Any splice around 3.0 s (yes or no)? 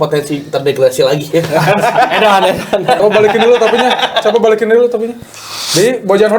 yes